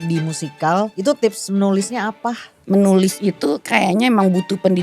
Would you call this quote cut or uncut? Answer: cut